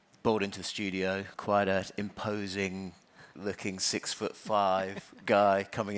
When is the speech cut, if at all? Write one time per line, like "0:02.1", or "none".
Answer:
0:01.3